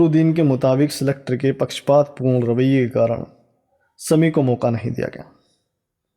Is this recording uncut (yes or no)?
yes